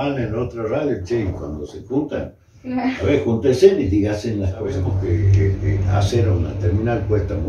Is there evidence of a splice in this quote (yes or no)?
yes